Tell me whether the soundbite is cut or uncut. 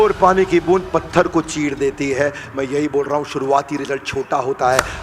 uncut